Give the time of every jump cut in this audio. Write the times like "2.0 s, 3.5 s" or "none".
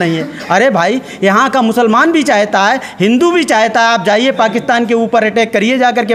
none